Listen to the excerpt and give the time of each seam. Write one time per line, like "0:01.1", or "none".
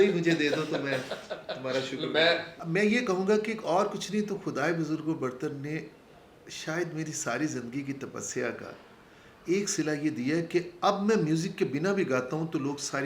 0:02.5